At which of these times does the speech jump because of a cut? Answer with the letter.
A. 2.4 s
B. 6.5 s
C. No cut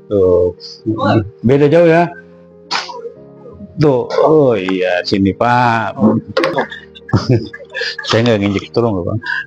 B